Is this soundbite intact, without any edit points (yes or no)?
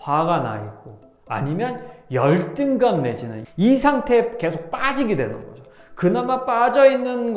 no